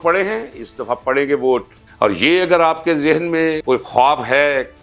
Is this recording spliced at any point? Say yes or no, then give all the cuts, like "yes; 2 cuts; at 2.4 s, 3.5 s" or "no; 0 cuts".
yes; 2 cuts; at 1.8 s, 3.6 s